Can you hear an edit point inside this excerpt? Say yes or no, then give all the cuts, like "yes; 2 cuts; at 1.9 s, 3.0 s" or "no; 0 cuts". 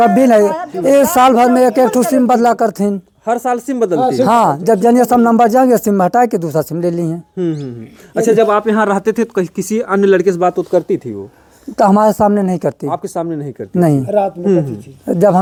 no; 0 cuts